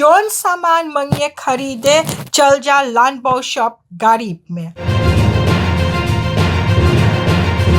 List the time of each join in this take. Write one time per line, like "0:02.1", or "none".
0:04.9

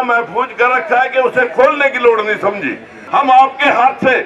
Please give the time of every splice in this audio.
0:03.0

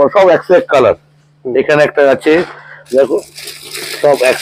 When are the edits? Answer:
none

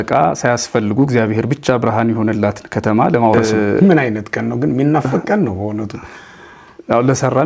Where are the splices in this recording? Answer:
0:03.4

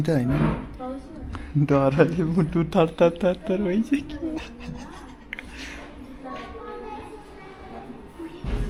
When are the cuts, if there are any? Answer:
none

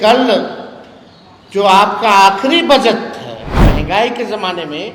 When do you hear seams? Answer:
0:03.7

